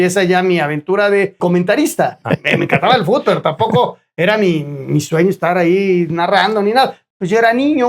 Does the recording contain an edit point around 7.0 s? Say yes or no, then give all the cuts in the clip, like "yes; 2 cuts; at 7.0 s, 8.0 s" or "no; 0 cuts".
yes; 3 cuts; at 1.4 s, 2.2 s, 7.0 s